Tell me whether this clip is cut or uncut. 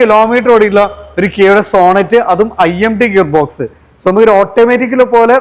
uncut